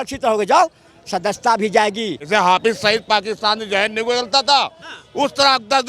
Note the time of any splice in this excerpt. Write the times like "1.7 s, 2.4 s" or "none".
2.3 s